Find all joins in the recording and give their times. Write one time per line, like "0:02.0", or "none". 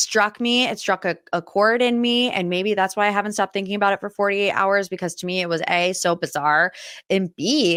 none